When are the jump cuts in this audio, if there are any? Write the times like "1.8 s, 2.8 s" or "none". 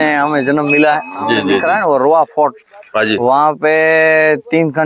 1.6 s